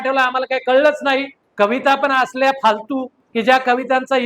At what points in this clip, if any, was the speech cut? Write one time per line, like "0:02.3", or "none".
0:01.4
0:03.2